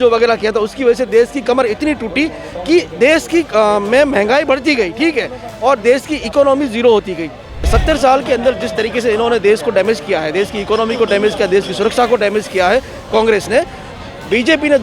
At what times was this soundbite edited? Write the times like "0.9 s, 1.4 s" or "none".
7.7 s